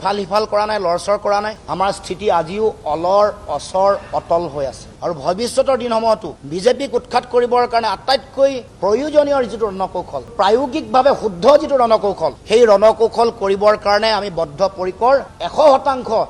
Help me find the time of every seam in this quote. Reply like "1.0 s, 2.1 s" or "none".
none